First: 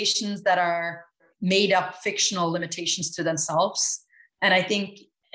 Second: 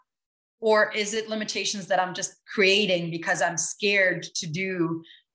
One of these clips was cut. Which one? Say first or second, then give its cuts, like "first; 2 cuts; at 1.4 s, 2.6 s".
first; 1 cut; at 1.3 s